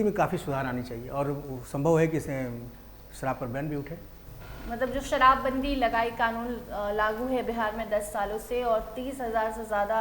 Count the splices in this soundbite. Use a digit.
0